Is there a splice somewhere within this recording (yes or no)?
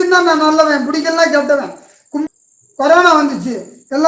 yes